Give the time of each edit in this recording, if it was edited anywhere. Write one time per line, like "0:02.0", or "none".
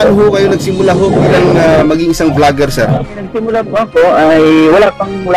0:03.4